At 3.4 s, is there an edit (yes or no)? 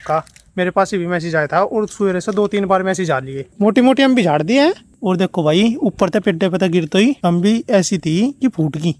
yes